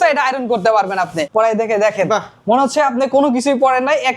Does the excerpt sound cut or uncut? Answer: cut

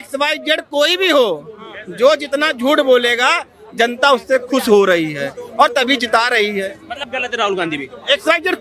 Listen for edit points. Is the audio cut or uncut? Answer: uncut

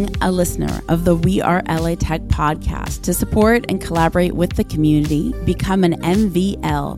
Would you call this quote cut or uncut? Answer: uncut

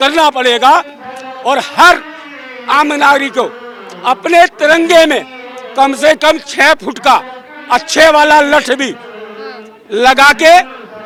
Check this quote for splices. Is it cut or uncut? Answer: uncut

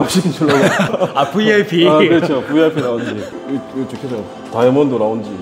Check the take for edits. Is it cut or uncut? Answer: uncut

